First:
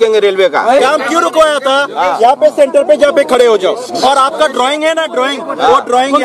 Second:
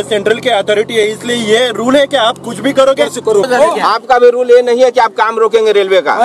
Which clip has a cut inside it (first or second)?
second